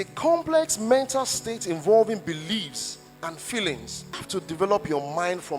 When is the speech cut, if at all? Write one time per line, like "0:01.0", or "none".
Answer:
0:04.2